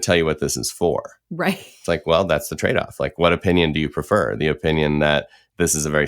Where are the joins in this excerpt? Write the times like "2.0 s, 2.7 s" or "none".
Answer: 1.8 s